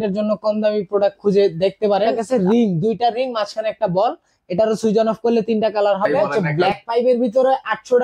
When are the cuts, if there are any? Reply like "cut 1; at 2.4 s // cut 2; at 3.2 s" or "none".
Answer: cut 1; at 2.2 s // cut 2; at 6.5 s